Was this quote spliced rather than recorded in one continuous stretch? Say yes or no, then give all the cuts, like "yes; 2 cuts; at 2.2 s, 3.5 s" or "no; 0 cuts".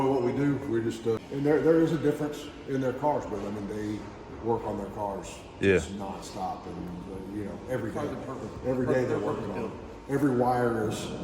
yes; 1 cut; at 1.2 s